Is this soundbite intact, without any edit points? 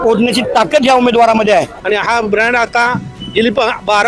no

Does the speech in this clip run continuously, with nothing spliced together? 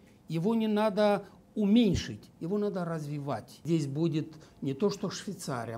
no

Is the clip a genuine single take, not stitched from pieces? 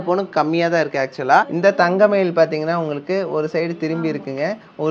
no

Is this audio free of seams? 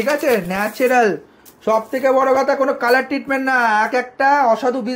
yes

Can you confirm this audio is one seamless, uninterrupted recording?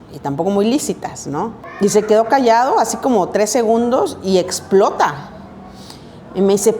no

